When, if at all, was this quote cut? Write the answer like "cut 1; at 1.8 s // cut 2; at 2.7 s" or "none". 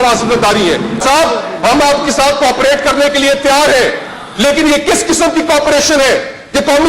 cut 1; at 1.0 s

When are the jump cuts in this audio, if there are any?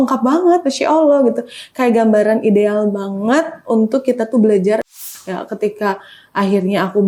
cut 1; at 4.9 s

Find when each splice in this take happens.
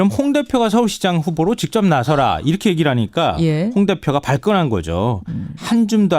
cut 1; at 4.7 s

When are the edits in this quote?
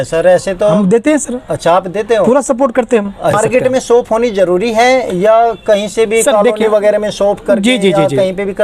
cut 1; at 3.4 s

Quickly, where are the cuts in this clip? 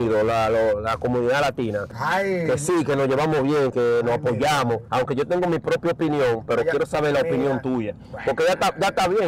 none

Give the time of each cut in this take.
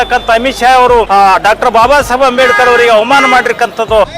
cut 1; at 1.1 s

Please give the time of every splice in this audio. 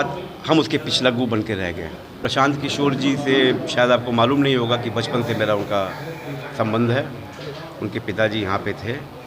cut 1; at 2.3 s

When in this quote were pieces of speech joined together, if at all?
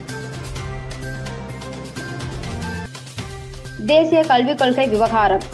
cut 1; at 2.3 s

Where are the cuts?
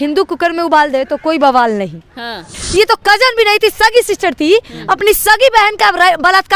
cut 1; at 2.5 s

